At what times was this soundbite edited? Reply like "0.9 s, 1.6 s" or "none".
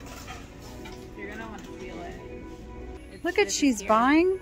3.0 s